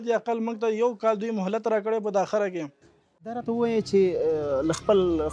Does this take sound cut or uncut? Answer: cut